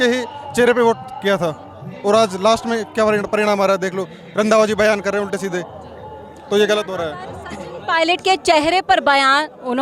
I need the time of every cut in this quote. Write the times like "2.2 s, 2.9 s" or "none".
none